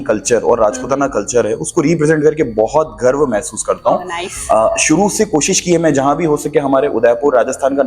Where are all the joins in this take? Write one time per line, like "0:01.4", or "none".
none

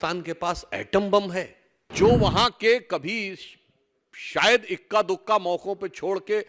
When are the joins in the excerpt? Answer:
0:01.9

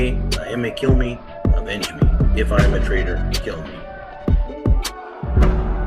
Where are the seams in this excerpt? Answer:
0:03.9

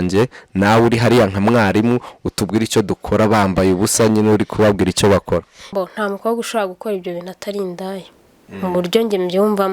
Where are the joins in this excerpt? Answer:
0:05.7

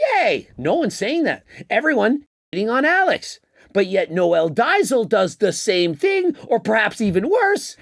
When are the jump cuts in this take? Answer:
0:01.5

